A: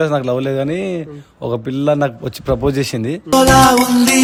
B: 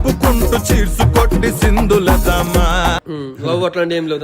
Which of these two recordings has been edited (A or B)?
B